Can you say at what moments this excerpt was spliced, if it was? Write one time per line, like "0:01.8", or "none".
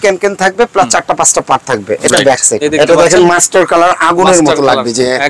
0:02.5